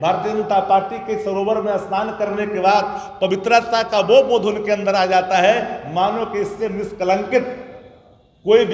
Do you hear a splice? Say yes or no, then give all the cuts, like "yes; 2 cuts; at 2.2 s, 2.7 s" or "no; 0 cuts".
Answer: no; 0 cuts